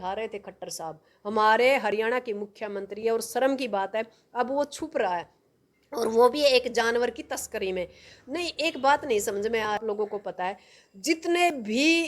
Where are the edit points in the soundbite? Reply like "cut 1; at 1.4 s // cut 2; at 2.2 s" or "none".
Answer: cut 1; at 9.8 s

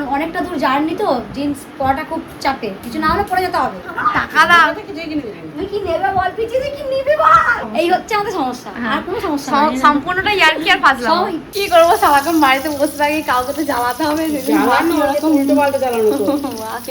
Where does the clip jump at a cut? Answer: cut 1; at 3.8 s // cut 2; at 7.6 s // cut 3; at 11.6 s

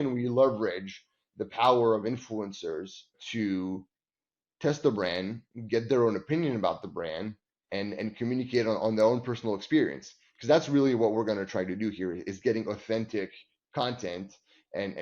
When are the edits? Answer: cut 1; at 3.2 s

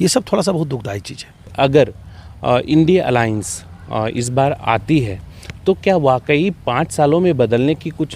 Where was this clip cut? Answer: cut 1; at 1.5 s

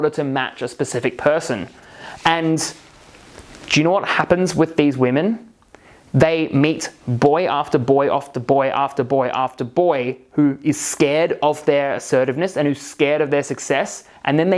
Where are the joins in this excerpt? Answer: none

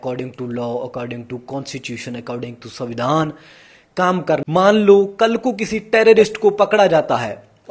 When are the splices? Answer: cut 1; at 4.4 s

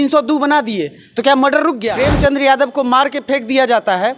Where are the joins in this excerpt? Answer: cut 1; at 1.9 s

